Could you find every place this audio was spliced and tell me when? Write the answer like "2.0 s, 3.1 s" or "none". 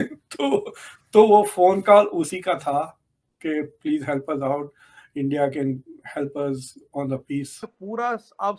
7.7 s